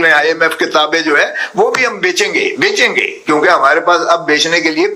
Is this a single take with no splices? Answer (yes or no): yes